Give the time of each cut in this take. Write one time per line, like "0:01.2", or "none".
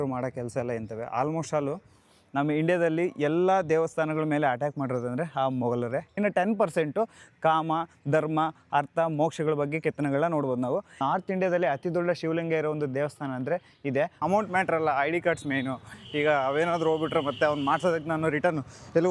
0:06.2
0:10.9
0:14.1